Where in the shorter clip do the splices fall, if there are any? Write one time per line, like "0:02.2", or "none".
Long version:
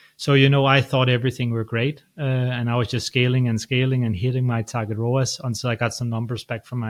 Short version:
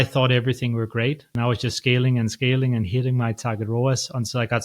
0:01.3